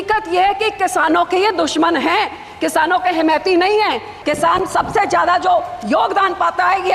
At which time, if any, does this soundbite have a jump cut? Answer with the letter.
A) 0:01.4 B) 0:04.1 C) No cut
B